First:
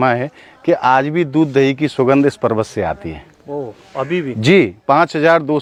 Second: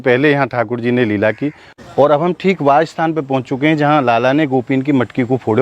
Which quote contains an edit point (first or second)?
second